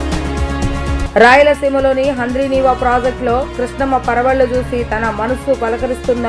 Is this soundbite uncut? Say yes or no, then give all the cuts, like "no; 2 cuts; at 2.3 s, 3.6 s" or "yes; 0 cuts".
no; 1 cut; at 1.0 s